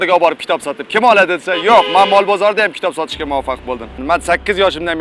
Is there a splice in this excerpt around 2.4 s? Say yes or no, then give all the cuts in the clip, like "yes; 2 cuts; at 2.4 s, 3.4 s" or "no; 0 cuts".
no; 1 cut; at 4.0 s